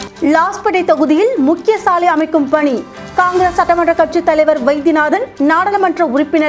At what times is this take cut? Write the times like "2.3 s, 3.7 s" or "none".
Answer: none